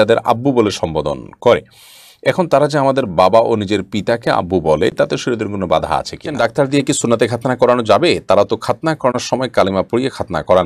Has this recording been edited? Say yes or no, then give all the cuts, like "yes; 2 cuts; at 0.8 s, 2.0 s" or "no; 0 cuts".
yes; 1 cut; at 6.4 s